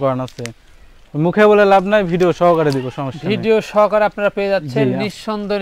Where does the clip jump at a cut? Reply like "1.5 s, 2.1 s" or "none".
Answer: none